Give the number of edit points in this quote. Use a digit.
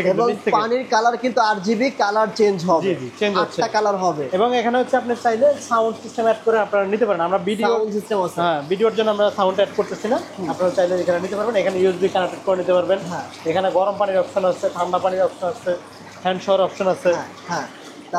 0